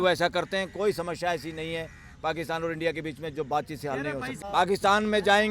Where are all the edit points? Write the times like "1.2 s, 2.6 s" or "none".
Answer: 4.3 s